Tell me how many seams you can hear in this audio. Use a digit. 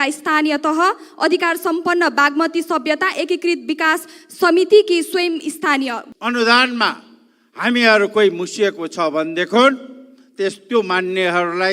1